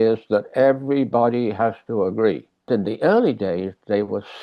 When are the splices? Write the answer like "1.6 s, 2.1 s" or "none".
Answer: 2.7 s